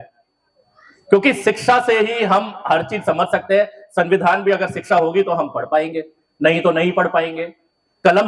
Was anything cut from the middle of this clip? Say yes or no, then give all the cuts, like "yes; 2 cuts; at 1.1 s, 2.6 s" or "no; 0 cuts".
no; 0 cuts